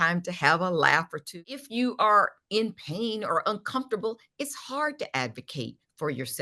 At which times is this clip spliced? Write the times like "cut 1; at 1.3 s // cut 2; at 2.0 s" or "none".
cut 1; at 1.5 s